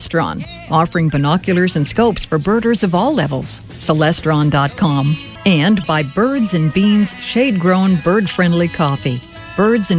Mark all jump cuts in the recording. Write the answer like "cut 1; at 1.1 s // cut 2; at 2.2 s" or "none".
cut 1; at 5.3 s